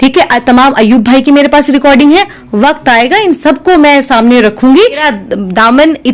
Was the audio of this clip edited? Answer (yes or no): yes